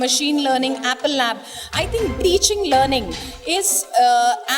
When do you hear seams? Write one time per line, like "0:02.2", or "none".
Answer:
0:02.2